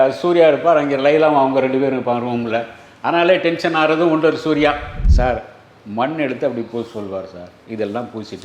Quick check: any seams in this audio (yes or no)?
yes